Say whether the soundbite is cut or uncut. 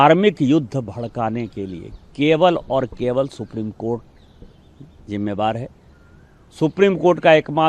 uncut